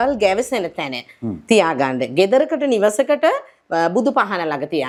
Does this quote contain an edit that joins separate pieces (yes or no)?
no